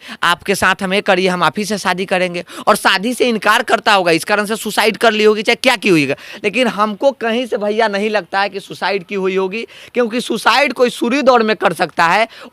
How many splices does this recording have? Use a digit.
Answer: 0